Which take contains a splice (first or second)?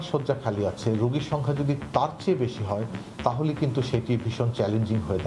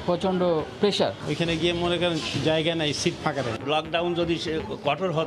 second